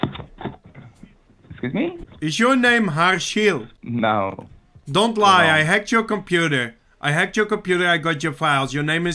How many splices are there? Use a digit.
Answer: 2